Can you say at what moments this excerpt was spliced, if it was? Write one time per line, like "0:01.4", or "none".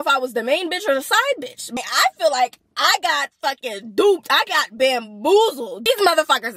0:01.5